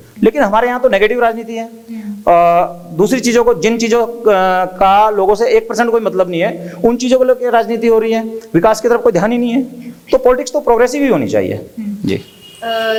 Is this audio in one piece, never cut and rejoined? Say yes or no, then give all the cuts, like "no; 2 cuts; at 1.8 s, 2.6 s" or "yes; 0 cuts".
yes; 0 cuts